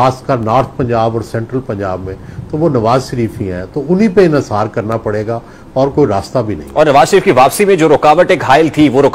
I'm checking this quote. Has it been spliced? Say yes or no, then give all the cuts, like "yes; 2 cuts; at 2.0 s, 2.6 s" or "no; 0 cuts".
no; 0 cuts